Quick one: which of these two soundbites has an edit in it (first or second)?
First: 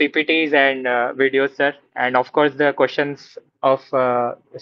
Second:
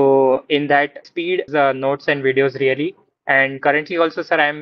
second